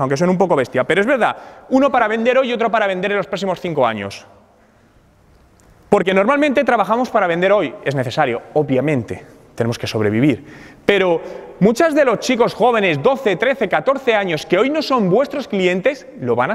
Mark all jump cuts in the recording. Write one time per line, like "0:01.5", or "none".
none